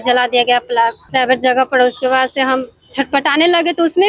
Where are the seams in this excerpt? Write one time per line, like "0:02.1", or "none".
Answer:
0:01.0